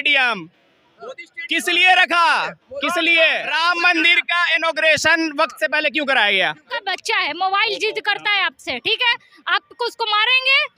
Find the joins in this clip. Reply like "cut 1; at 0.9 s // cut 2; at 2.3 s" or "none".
cut 1; at 3.5 s // cut 2; at 6.7 s